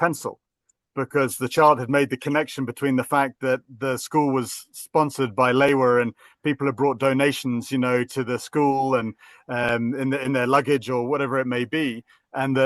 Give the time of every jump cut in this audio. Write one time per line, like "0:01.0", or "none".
none